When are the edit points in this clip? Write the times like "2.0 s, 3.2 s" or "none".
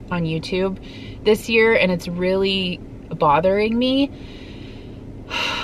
none